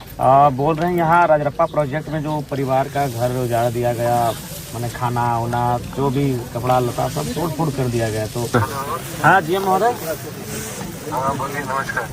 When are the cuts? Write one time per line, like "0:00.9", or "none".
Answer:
0:08.5